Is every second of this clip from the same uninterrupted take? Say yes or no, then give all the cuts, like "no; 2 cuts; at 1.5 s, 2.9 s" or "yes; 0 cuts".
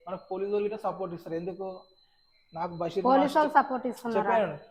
yes; 0 cuts